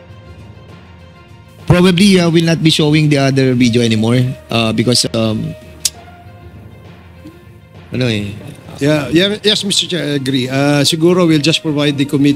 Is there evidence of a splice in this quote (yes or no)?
yes